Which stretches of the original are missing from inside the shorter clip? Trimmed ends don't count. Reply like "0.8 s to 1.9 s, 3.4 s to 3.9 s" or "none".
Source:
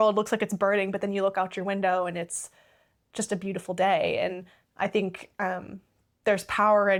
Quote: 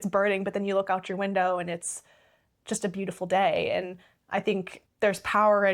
5.2 s to 6.0 s